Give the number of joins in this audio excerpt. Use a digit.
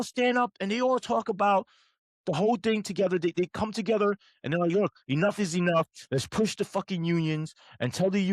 0